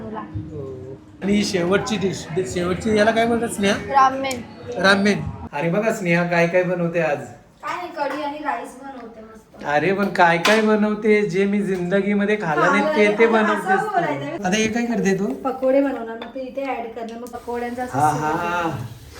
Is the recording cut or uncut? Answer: cut